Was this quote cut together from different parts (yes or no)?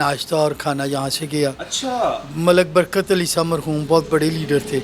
no